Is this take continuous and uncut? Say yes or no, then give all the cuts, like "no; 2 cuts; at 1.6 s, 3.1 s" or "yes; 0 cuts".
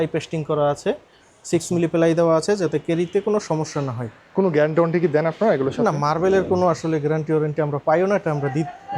yes; 0 cuts